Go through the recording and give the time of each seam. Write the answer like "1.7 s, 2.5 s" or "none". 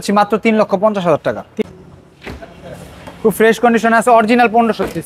1.5 s